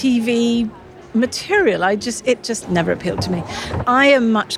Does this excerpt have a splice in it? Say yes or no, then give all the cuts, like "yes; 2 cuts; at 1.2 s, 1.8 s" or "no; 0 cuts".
yes; 2 cuts; at 2.6 s, 3.8 s